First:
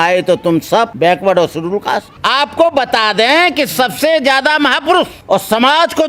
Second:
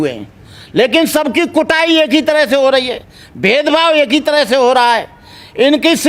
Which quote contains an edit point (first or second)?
first